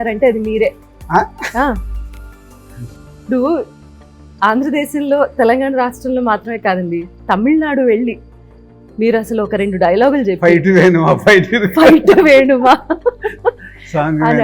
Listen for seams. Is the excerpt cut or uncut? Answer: uncut